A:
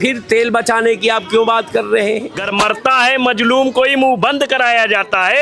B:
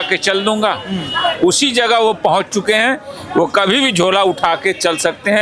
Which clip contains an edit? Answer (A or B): A